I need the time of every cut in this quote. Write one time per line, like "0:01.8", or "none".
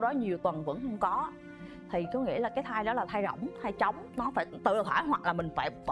none